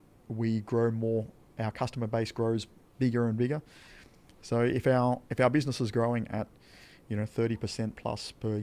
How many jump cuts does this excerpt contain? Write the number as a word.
zero